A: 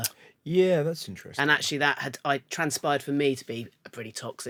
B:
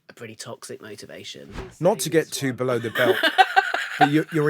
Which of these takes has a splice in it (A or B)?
B